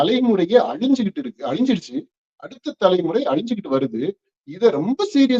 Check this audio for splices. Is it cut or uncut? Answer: uncut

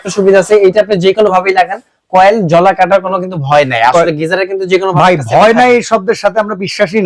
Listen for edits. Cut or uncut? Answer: uncut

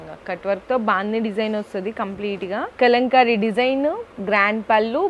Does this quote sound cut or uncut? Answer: cut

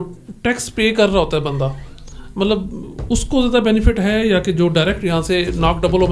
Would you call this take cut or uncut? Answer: uncut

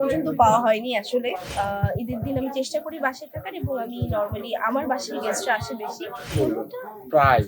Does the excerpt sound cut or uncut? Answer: cut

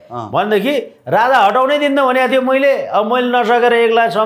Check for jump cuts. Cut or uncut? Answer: uncut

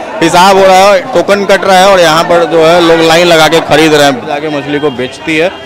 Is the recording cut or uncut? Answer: cut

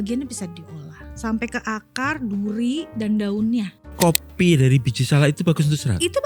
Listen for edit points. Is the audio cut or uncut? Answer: cut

